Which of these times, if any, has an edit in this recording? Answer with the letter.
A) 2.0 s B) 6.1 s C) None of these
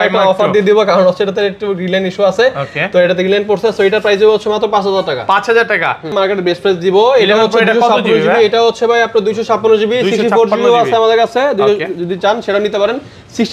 B